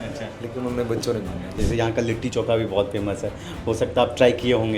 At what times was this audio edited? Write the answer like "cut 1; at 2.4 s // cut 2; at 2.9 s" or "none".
cut 1; at 1.5 s

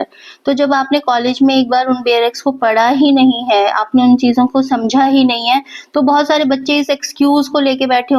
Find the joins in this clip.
none

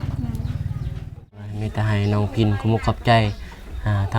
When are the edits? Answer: cut 1; at 1.4 s

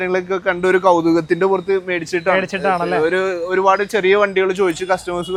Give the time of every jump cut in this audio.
none

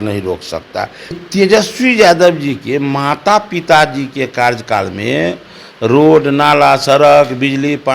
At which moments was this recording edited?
cut 1; at 1.2 s

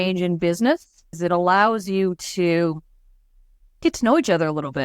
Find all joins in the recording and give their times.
cut 1; at 1.2 s

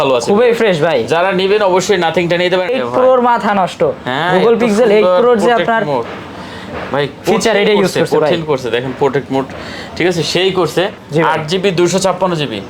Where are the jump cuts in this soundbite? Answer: cut 1; at 2.7 s // cut 2; at 11.0 s

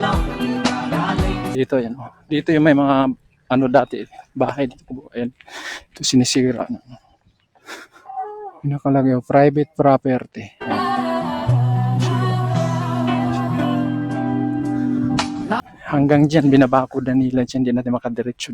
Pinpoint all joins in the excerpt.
cut 1; at 1.5 s // cut 2; at 10.6 s // cut 3; at 15.6 s

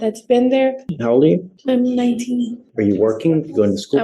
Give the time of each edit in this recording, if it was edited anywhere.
cut 1; at 0.9 s // cut 2; at 1.5 s // cut 3; at 2.6 s

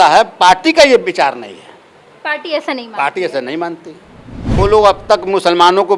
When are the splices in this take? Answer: cut 1; at 4.5 s

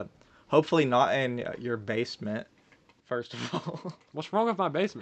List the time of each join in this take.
none

